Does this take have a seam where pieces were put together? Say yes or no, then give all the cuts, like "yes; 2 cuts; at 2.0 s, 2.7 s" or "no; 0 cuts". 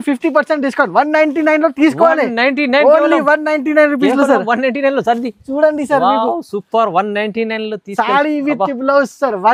no; 0 cuts